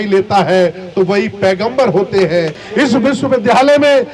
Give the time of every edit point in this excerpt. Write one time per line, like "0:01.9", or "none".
0:02.6